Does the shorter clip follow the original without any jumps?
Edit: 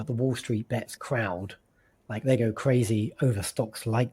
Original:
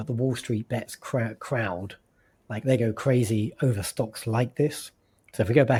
no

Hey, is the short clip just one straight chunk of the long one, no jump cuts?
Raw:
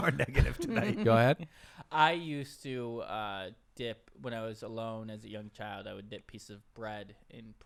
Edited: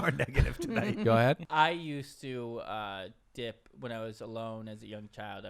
no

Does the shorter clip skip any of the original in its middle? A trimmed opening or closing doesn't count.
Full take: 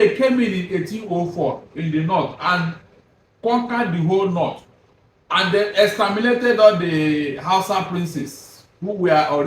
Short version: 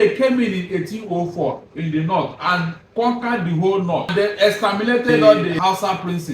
yes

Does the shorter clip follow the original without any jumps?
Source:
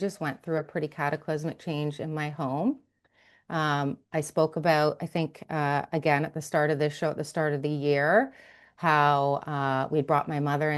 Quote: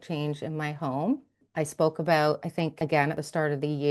no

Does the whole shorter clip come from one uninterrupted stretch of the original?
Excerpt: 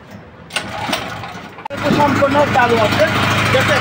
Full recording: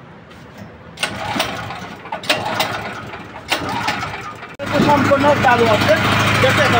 no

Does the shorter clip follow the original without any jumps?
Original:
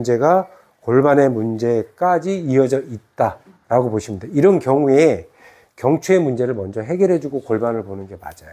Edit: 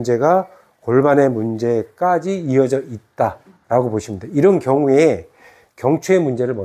yes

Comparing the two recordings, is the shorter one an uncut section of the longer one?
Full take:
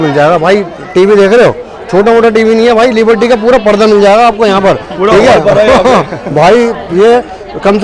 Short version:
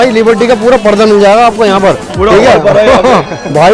yes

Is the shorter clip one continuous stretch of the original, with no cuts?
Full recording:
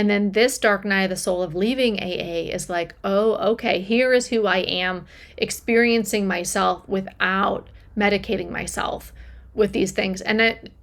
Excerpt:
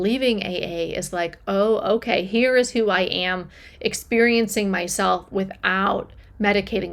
yes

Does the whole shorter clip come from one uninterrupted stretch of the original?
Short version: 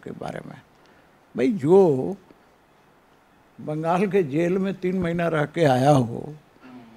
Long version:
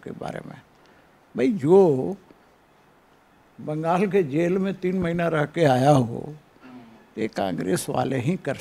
yes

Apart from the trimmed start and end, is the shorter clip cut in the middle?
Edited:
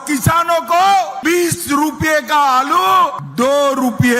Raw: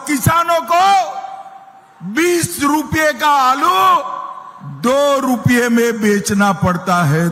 yes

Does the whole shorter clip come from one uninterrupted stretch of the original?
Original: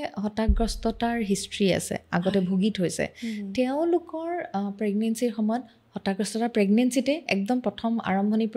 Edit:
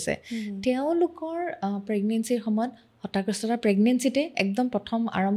yes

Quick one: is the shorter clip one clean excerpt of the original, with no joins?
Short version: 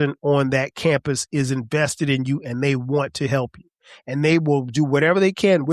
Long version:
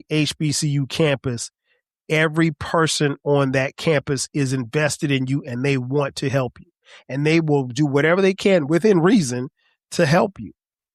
yes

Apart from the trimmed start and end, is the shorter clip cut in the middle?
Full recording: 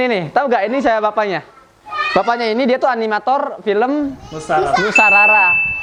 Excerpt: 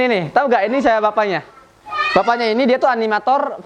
no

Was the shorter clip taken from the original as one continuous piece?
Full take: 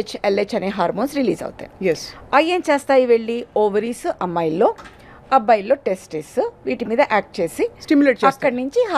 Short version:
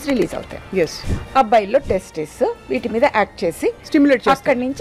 no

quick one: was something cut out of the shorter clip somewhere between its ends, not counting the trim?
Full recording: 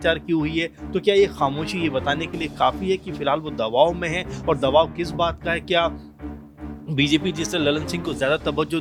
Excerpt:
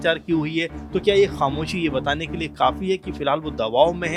no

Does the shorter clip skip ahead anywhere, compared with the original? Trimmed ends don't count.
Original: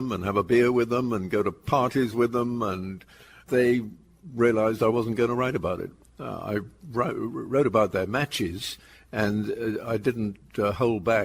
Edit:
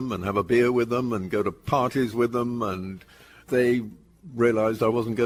no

